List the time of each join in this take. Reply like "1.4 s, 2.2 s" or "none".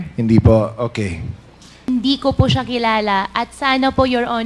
1.9 s